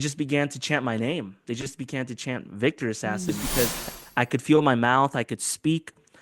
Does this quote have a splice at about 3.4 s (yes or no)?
yes